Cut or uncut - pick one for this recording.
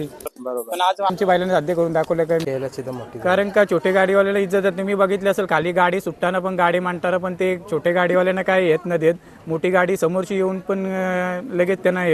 cut